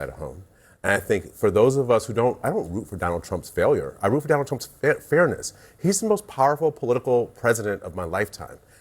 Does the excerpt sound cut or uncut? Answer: uncut